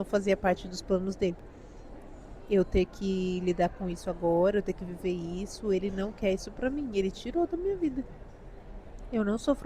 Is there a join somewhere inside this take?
no; 0 cuts

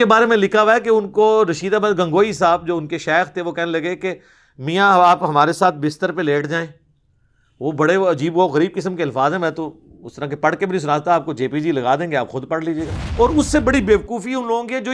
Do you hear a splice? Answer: yes; 1 cut; at 13.0 s

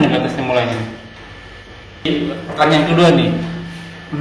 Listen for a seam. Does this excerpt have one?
yes; 1 cut; at 2.1 s

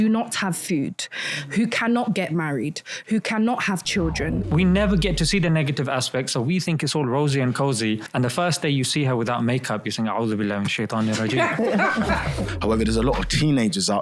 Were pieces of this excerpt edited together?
yes; 3 cuts; at 4.4 s, 8.1 s, 12.4 s

